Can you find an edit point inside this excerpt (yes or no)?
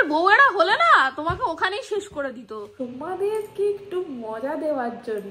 yes